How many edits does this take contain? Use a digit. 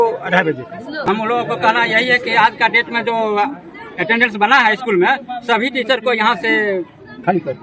1